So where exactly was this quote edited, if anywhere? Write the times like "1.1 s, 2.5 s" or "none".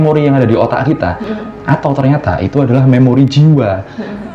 1.3 s